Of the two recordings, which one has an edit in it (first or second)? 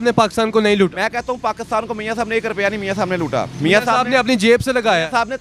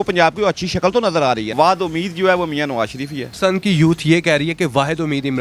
second